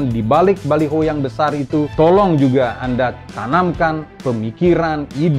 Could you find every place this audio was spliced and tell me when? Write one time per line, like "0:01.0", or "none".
0:01.9
0:03.3
0:04.1